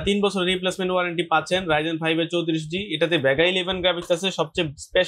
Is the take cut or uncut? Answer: uncut